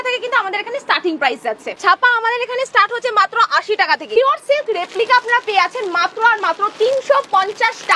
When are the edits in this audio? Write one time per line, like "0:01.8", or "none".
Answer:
0:01.7
0:04.2